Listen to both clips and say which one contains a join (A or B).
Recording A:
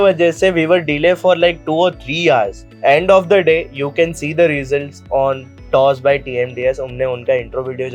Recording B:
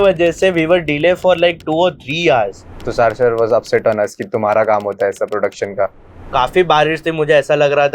B